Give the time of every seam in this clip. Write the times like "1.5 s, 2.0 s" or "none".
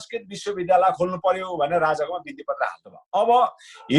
3.0 s